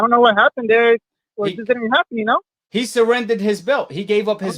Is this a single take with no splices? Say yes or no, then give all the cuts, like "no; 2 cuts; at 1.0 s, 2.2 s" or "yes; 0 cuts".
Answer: no; 1 cut; at 2.6 s